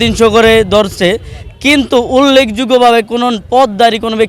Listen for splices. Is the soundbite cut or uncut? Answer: uncut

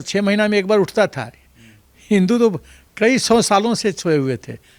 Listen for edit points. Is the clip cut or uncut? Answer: uncut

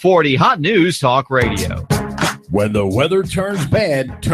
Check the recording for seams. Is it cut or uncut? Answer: uncut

